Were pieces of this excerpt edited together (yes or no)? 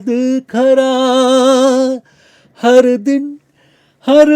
no